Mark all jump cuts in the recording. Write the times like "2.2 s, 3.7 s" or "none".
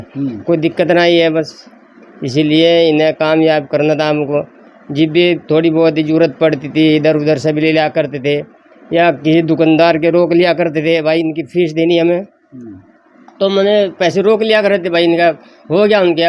none